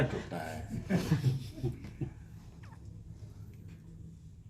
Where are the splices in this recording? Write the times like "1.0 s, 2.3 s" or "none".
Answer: none

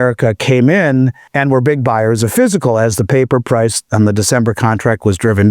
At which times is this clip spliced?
1.2 s

